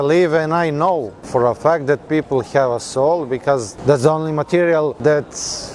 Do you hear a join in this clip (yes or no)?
yes